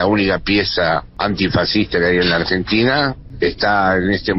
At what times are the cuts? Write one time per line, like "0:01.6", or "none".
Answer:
0:01.1
0:03.2